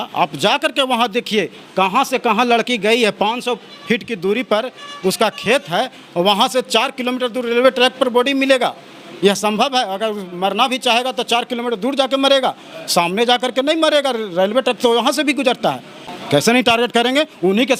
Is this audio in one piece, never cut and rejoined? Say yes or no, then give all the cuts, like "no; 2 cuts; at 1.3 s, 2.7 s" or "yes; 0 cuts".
no; 1 cut; at 16.1 s